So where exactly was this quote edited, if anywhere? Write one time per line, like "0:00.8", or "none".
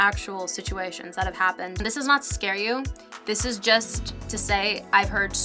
0:01.8